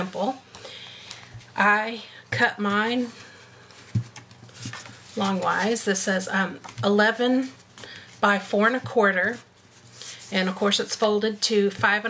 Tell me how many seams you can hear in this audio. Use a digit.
1